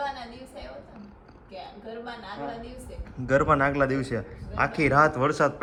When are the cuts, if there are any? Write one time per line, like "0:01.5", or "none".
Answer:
none